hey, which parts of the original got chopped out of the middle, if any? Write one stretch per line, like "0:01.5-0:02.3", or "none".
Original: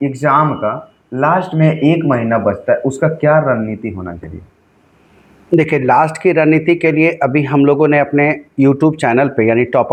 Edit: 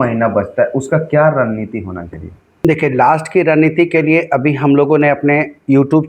0:04.7-0:05.5